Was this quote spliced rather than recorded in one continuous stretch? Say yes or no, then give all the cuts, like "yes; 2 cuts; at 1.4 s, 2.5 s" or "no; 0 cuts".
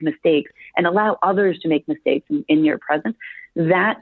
no; 0 cuts